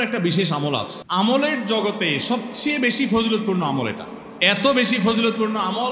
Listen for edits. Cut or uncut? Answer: cut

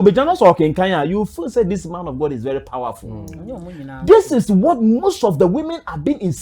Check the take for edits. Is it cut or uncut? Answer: uncut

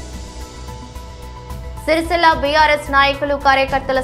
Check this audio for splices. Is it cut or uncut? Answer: cut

